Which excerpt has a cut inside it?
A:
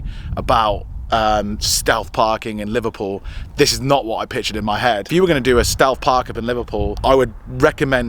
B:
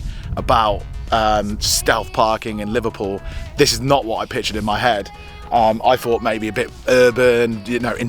A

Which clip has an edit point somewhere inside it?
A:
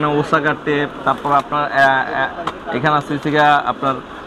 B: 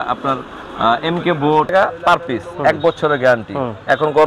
B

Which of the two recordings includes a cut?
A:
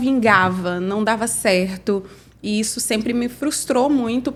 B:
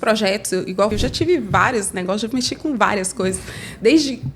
B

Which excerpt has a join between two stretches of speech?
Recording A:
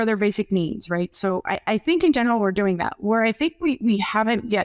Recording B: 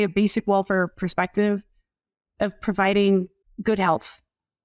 B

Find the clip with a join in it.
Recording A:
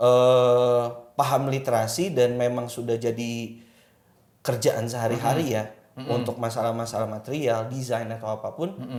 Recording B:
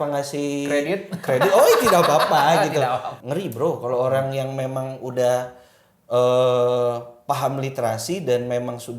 B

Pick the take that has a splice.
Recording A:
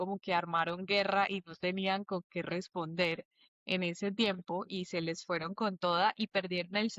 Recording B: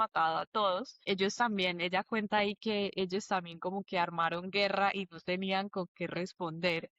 B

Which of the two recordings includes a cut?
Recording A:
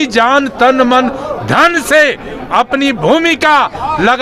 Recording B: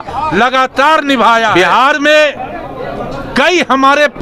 B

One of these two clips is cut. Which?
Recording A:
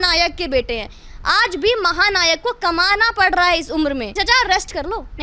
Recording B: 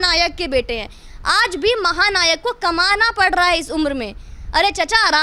A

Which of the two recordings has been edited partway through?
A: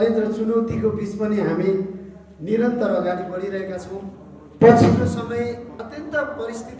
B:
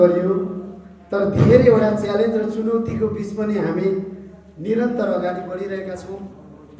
A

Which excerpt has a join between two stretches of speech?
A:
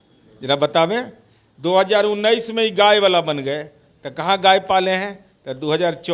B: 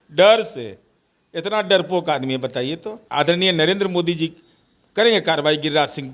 B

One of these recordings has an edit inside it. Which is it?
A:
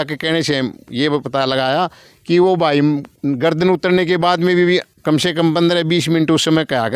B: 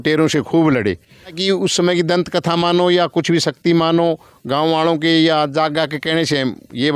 B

